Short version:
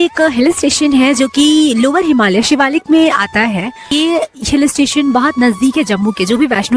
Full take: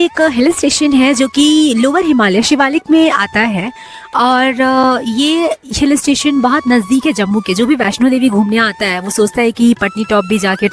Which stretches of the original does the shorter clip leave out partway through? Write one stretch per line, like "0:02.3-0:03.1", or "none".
0:03.9-0:05.2